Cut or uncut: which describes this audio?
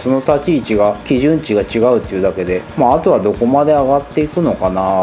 uncut